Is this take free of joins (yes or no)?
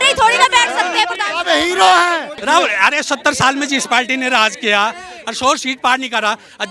no